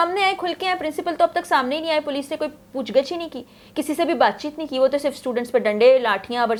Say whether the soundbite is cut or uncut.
uncut